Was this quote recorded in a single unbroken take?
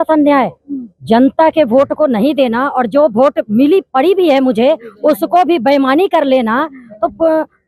yes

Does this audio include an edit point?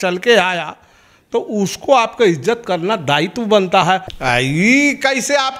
yes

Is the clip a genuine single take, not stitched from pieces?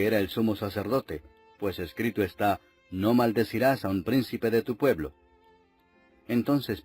no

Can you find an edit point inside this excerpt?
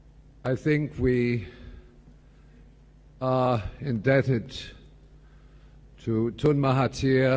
no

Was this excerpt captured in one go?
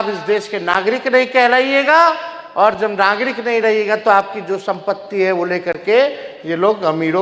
yes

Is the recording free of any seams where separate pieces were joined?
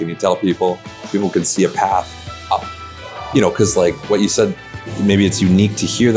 yes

